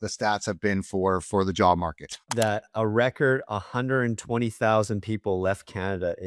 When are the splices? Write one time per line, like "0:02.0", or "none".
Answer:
0:02.3

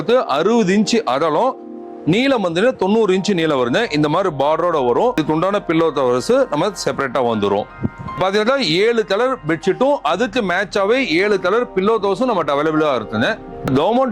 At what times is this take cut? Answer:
0:05.2
0:08.1

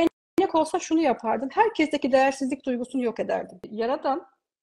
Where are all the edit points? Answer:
0:03.6

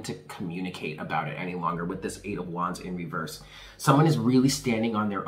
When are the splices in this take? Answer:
none

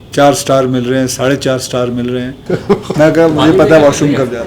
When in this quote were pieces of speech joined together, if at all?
0:02.4

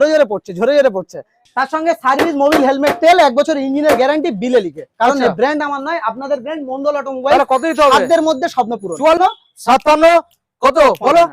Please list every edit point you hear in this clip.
0:01.4
0:09.2

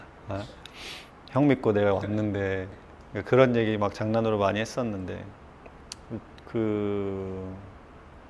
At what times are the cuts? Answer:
none

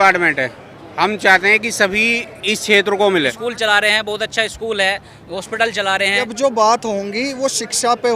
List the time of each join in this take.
0:03.3
0:06.3

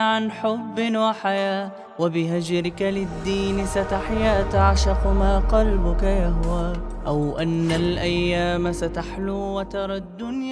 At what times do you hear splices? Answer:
none

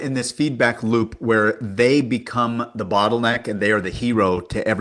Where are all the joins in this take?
none

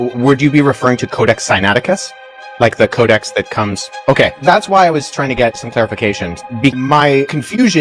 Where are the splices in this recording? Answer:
0:06.8

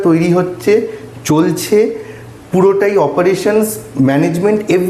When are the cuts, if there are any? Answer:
none

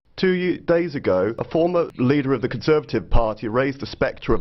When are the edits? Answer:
0:01.6

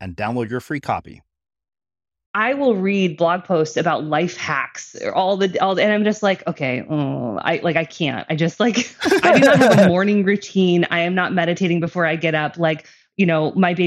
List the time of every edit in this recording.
0:02.1

